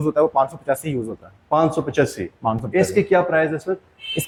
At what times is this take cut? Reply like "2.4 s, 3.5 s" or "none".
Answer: none